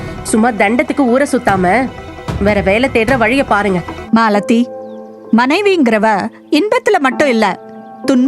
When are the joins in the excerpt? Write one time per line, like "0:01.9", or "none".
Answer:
0:03.9